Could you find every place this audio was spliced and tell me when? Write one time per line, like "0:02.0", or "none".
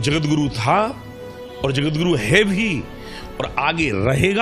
none